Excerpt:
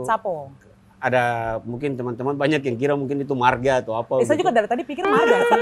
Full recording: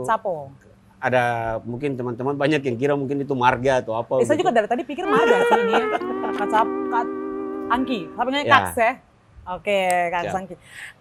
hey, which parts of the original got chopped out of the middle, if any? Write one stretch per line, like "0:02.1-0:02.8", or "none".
none